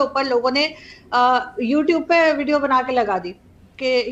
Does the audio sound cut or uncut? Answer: uncut